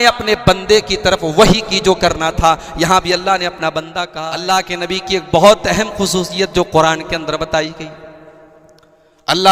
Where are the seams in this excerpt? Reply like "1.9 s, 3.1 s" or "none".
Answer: 4.2 s

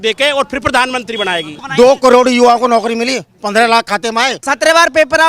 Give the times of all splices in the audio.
1.6 s, 4.4 s

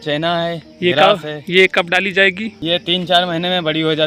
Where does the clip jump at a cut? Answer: none

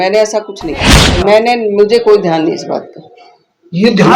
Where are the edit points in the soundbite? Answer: 1.1 s

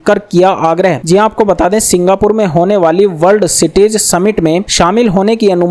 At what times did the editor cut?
none

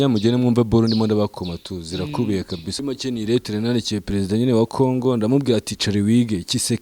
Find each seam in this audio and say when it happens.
2.7 s

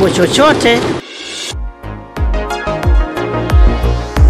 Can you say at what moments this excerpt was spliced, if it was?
1.0 s

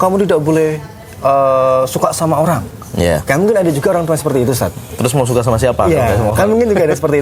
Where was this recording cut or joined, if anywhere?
none

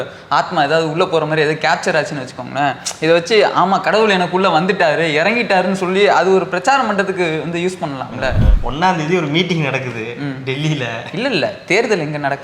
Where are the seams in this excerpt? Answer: 8.5 s

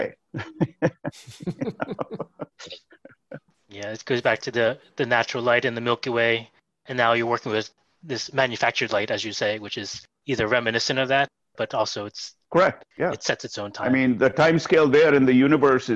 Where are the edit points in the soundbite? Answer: 3.6 s

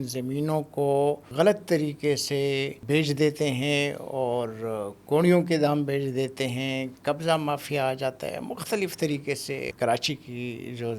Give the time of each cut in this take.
1.3 s, 2.8 s, 9.7 s

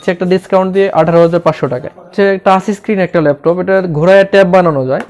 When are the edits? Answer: 2.1 s

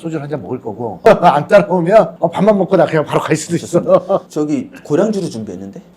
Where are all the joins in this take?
1.1 s

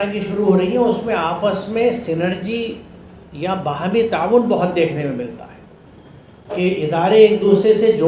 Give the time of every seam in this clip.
none

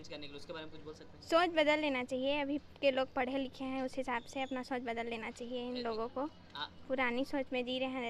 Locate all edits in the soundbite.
none

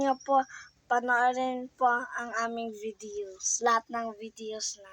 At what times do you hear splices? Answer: none

